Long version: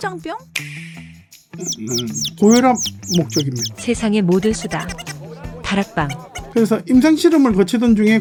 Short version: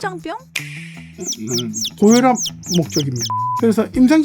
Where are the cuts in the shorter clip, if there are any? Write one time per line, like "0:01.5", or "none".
0:01.0
0:03.3